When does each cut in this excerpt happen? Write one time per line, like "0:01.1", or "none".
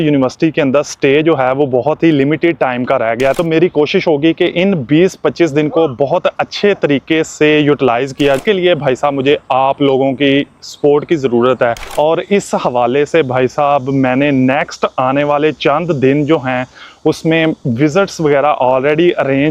0:03.3
0:08.4
0:11.8